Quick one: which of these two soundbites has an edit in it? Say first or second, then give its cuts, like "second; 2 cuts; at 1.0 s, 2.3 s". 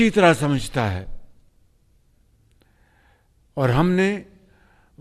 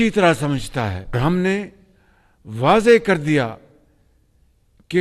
second; 1 cut; at 1.1 s